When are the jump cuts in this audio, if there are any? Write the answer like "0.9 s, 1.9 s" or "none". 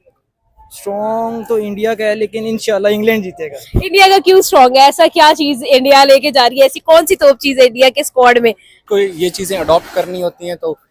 8.8 s